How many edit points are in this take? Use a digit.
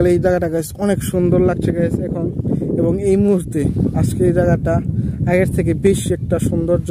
0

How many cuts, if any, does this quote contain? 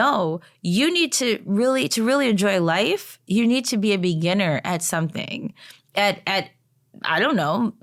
0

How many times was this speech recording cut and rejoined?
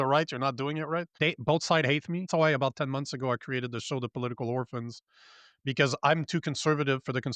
2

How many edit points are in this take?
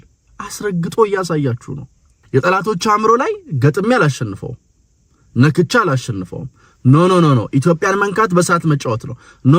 1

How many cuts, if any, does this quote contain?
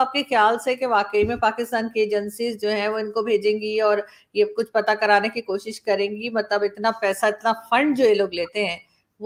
0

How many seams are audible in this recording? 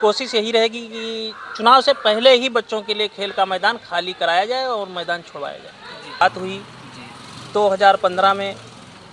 1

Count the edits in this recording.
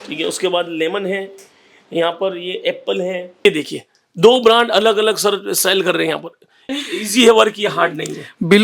2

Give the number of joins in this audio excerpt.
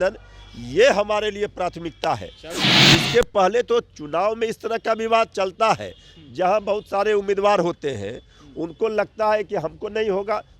1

